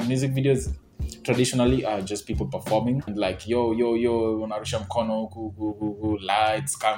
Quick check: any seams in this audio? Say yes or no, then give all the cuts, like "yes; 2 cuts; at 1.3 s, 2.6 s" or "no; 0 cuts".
yes; 1 cut; at 3.1 s